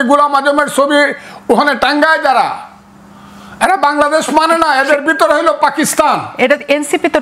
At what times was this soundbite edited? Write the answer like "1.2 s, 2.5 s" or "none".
none